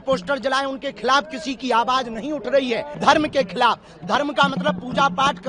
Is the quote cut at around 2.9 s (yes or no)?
yes